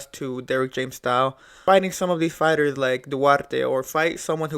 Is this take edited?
yes; 1 cut; at 1.6 s

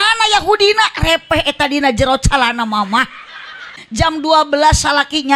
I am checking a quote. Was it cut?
yes; 1 cut; at 3.8 s

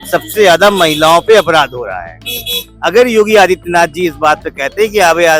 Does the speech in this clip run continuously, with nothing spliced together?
yes; 0 cuts

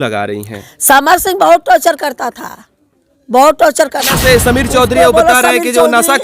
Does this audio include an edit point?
yes; 1 cut; at 4.1 s

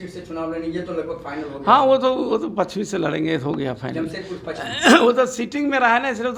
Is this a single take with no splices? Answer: yes; 0 cuts

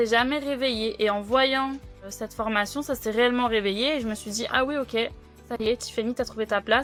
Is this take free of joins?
yes; 0 cuts

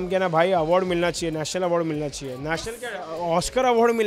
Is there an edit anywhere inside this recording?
no; 0 cuts

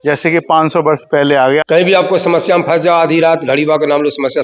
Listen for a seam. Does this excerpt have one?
yes; 1 cut; at 1.6 s

